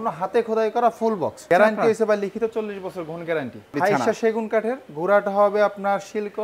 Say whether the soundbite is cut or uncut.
cut